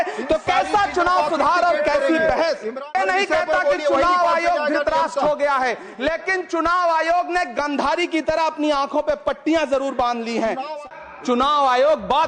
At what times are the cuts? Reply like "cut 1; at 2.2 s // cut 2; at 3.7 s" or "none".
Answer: cut 1; at 2.8 s // cut 2; at 10.8 s